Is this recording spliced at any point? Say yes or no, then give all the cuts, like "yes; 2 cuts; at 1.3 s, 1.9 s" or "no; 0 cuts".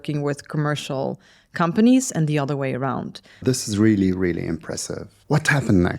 yes; 2 cuts; at 3.4 s, 5.1 s